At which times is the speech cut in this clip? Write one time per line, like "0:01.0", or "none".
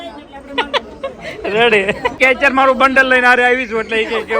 0:02.1